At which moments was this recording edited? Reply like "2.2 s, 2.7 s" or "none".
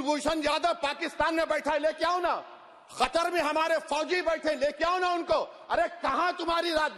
none